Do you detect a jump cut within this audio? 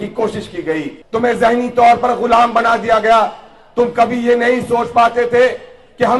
yes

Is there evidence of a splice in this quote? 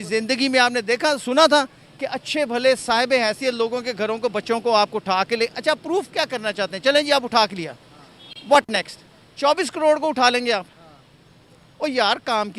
no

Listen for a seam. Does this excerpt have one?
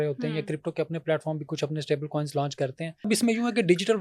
yes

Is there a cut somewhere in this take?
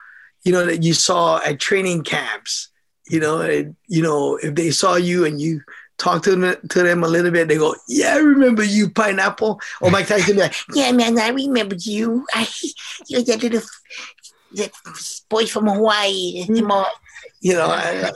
no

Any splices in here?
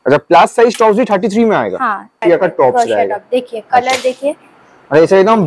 yes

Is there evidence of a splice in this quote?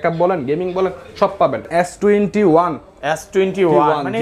yes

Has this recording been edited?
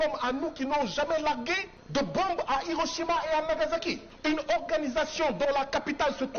yes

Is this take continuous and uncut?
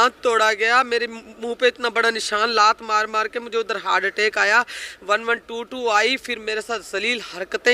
yes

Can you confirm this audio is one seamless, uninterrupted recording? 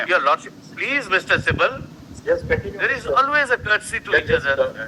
yes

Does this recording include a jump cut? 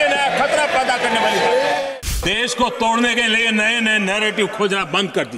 yes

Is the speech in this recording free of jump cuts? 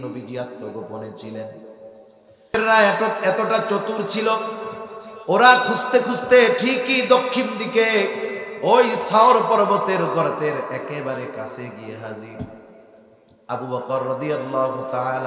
no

